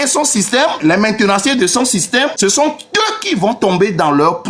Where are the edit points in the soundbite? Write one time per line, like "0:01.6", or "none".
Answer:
0:00.8
0:02.3